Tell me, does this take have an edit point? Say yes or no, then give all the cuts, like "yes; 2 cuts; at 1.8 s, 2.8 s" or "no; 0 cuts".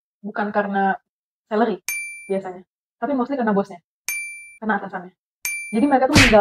no; 0 cuts